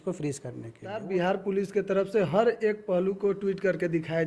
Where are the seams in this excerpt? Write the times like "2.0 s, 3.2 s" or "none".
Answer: 1.0 s